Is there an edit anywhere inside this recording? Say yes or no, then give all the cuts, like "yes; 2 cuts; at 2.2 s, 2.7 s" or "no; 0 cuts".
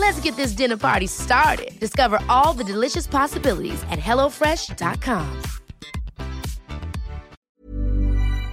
yes; 1 cut; at 7.4 s